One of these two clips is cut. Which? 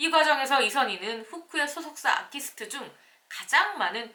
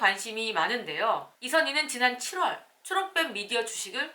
second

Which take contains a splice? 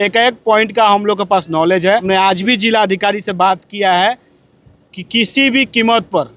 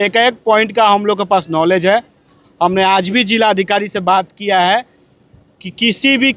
first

